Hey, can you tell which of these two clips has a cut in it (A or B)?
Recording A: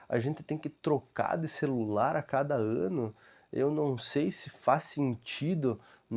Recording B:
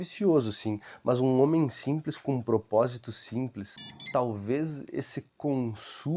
B